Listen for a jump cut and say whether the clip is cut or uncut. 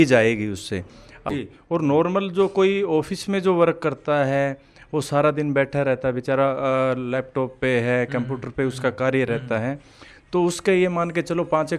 cut